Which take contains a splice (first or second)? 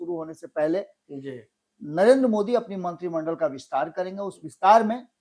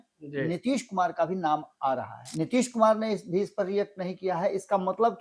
second